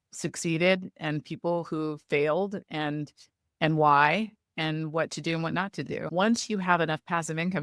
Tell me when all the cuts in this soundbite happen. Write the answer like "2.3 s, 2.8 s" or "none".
6.1 s